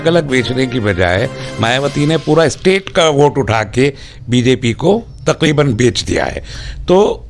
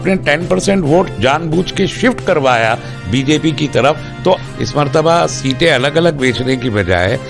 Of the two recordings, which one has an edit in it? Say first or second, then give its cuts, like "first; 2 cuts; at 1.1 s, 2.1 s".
second; 1 cut; at 4.4 s